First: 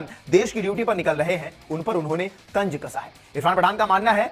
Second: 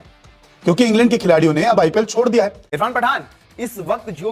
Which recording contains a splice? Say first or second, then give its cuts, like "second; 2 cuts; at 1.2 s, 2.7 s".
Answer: second; 1 cut; at 2.6 s